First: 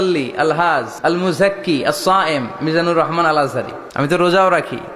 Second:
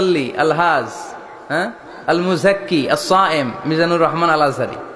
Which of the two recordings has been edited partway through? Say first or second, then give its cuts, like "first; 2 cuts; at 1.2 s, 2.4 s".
first; 2 cuts; at 0.9 s, 3.8 s